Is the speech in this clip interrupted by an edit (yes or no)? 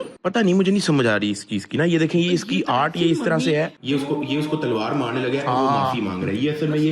no